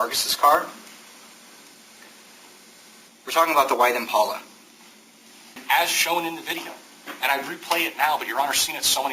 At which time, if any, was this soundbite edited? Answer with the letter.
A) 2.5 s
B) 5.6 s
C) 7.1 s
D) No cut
B